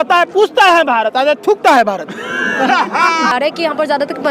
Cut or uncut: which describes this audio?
cut